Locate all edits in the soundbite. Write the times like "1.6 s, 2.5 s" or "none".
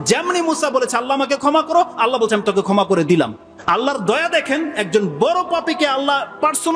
3.5 s